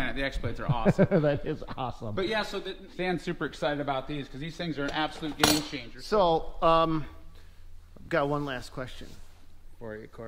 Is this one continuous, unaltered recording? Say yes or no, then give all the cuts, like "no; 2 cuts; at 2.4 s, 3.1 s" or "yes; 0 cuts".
no; 2 cuts; at 2.8 s, 5.9 s